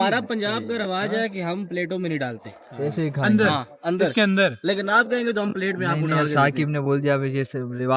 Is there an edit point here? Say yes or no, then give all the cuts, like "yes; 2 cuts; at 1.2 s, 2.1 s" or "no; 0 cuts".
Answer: no; 0 cuts